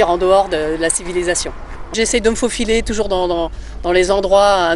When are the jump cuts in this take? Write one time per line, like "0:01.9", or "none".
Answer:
0:01.9